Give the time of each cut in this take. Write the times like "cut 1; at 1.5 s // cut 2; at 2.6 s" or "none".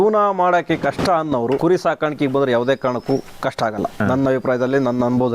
cut 1; at 1.6 s // cut 2; at 3.8 s